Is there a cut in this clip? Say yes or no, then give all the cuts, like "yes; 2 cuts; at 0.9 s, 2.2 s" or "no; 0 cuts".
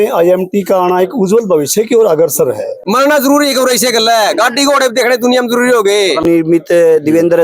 yes; 2 cuts; at 2.7 s, 6.2 s